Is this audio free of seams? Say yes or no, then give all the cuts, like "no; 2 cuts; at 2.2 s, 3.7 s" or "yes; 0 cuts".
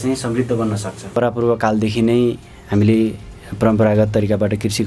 no; 1 cut; at 1.1 s